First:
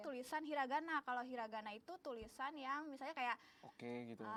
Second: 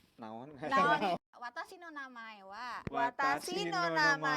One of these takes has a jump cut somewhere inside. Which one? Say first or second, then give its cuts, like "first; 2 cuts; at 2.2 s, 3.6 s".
second; 1 cut; at 1.2 s